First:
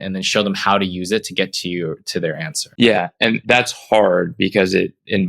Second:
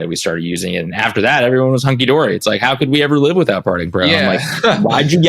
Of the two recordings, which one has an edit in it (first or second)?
first